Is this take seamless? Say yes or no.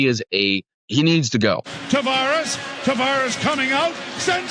no